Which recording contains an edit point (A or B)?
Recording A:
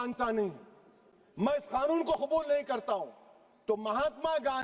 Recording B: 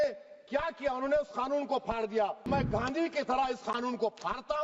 B